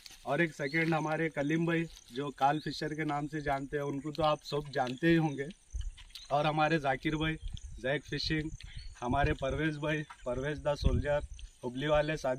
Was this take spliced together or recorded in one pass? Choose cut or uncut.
uncut